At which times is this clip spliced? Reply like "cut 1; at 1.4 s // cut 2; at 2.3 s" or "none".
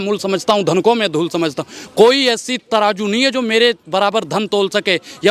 none